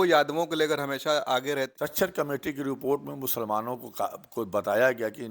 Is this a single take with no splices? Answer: no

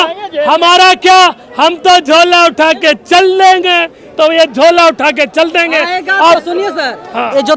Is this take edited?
no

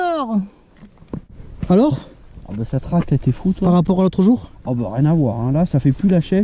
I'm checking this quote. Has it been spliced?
yes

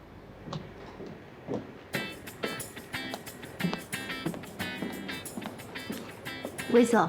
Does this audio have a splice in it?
no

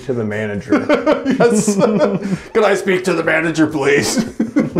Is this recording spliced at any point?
no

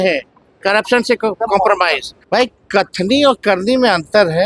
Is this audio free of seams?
no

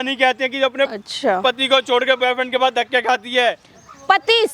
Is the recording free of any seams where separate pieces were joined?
yes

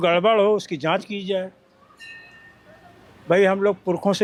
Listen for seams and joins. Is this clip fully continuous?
yes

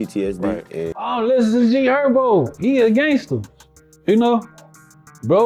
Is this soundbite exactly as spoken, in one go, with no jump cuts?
no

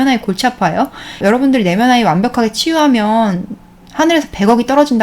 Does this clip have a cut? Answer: yes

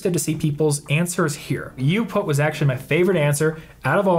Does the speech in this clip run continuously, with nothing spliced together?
no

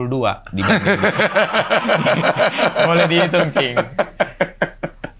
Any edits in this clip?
no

